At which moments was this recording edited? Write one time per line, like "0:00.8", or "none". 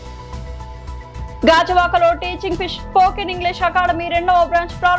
0:01.4